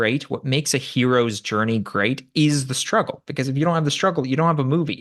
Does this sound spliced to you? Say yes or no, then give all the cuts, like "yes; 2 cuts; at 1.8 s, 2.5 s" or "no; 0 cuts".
no; 0 cuts